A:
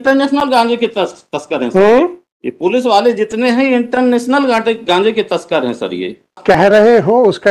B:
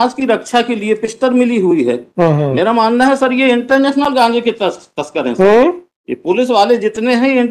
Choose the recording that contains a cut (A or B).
A